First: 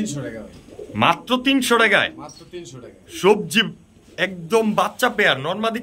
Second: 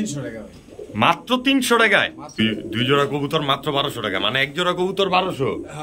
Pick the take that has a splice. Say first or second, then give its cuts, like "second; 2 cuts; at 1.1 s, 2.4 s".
second; 1 cut; at 2.4 s